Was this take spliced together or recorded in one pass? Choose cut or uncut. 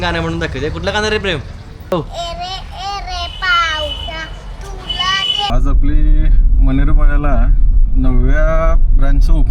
cut